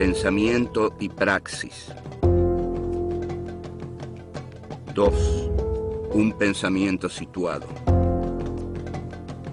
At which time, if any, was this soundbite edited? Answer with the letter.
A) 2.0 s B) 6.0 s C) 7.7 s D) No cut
B